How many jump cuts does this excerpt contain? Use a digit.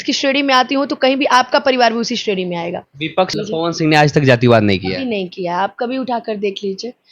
1